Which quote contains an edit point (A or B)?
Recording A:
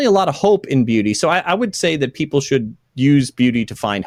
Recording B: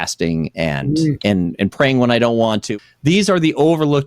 B